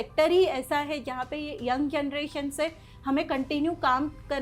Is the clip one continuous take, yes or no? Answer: yes